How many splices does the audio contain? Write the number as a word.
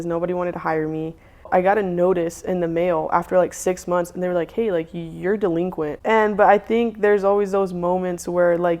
two